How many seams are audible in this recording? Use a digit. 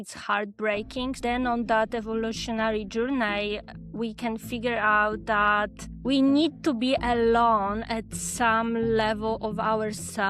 1